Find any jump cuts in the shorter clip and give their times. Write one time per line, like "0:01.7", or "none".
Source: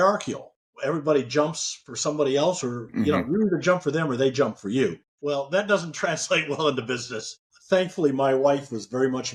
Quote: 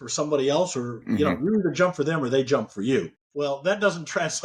none